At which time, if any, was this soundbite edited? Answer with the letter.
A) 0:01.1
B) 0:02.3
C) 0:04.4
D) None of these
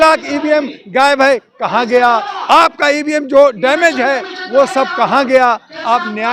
D